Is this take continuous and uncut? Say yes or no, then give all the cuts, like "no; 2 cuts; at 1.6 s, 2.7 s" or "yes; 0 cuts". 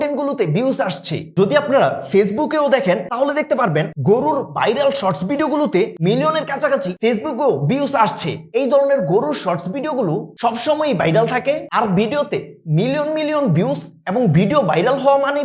yes; 0 cuts